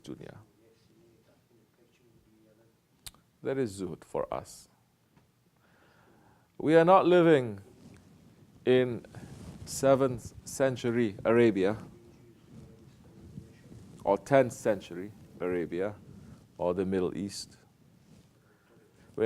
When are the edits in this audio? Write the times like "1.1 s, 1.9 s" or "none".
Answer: 3.5 s